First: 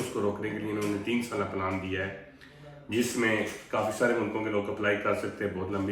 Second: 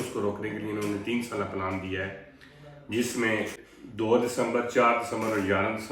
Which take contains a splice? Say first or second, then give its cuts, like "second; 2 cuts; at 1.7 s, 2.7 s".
second; 1 cut; at 3.6 s